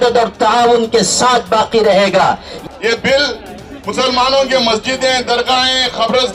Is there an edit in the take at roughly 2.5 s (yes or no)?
yes